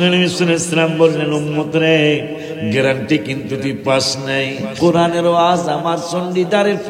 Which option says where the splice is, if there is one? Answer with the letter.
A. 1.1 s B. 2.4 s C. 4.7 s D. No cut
C